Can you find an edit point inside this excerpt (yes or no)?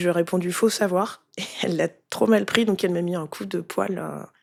no